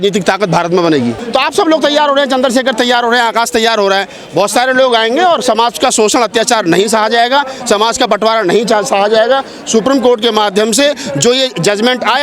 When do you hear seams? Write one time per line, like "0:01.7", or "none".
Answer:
0:01.2